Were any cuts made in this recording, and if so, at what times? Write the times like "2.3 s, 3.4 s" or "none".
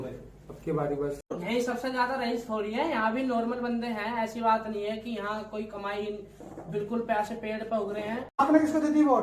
1.3 s, 8.4 s